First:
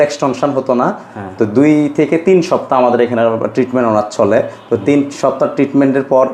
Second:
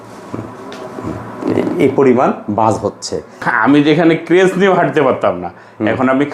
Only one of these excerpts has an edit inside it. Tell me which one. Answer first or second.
second